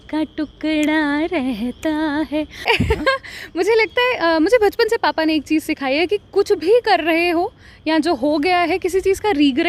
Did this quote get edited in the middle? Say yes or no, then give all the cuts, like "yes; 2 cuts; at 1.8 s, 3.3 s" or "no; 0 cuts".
yes; 1 cut; at 2.6 s